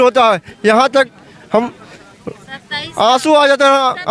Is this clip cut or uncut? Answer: uncut